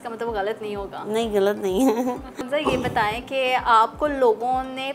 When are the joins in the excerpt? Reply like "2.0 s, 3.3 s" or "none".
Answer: 2.4 s